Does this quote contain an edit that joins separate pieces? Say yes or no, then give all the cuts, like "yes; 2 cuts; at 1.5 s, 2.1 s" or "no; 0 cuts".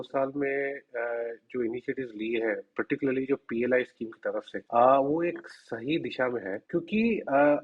yes; 2 cuts; at 4.5 s, 6.6 s